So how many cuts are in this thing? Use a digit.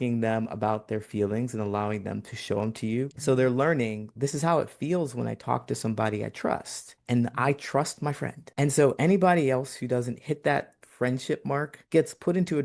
1